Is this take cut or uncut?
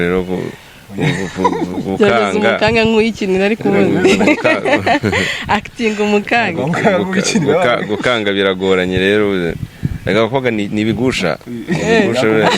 uncut